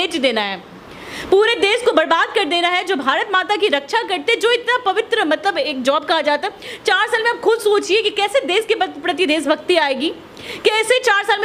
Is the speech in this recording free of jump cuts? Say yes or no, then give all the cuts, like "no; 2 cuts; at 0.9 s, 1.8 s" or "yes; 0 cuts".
yes; 0 cuts